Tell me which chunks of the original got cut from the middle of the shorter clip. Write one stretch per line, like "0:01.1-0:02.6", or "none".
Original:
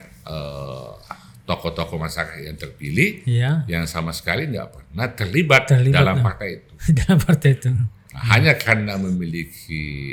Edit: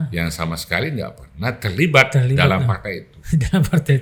none